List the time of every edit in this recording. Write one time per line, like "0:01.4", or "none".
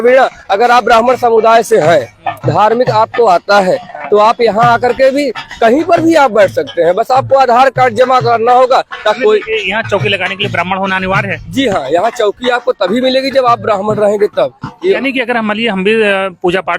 0:09.2
0:15.0